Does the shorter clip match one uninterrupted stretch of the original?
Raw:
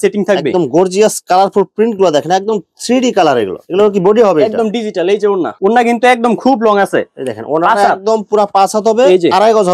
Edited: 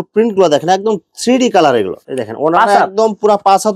no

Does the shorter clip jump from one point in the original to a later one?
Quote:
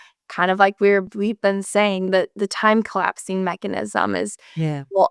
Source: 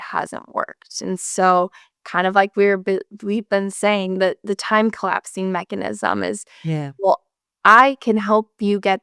yes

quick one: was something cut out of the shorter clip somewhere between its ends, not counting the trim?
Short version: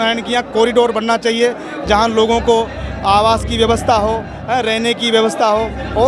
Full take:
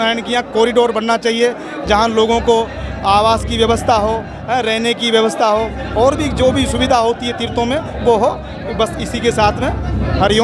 no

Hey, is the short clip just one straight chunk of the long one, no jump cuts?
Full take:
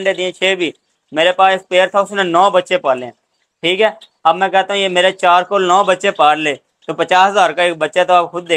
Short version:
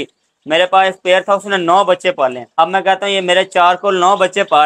no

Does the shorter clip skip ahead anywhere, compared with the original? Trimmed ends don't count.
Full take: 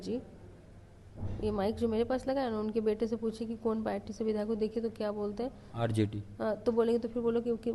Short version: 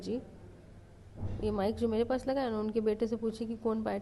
no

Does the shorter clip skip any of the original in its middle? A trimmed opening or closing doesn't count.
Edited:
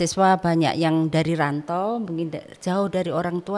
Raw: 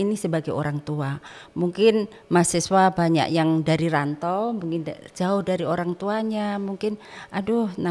no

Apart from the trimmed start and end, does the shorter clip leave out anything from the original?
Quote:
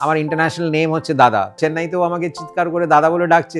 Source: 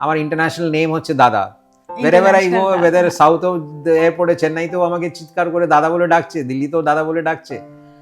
yes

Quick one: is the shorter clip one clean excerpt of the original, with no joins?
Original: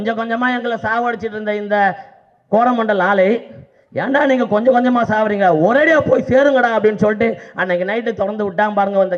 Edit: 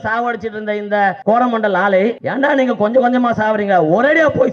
no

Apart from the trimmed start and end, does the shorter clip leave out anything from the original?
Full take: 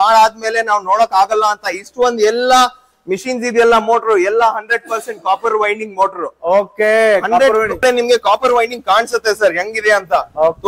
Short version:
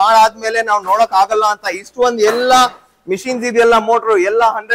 no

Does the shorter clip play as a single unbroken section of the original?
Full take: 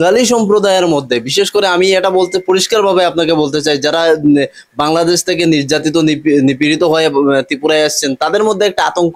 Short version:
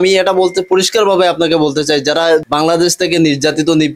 no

